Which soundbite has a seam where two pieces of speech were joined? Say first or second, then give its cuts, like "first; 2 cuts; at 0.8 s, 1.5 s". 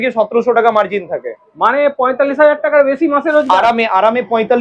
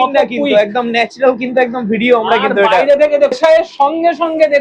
second; 1 cut; at 3.3 s